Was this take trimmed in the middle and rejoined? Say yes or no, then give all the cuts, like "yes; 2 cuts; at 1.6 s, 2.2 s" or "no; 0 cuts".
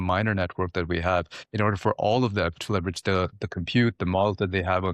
no; 0 cuts